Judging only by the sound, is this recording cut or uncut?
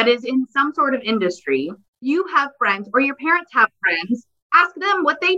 cut